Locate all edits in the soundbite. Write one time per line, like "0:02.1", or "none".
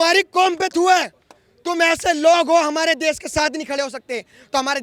none